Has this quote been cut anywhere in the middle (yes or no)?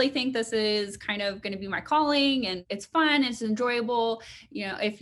yes